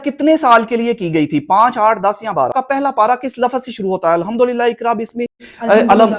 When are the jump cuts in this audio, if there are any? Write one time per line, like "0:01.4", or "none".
0:02.5